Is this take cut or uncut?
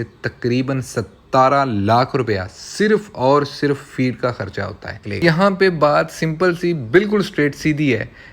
cut